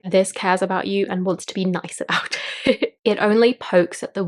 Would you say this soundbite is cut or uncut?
cut